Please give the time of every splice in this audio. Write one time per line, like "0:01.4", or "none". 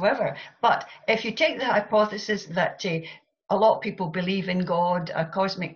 none